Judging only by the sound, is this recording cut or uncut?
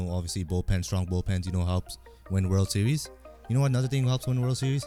uncut